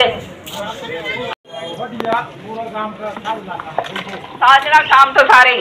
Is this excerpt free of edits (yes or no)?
yes